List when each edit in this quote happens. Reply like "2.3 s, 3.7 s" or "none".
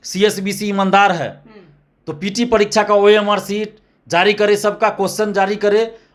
none